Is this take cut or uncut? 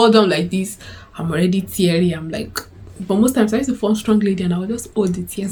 uncut